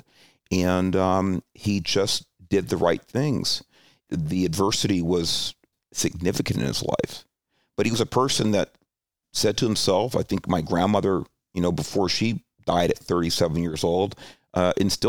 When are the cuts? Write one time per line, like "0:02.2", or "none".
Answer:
0:04.0
0:05.7
0:09.2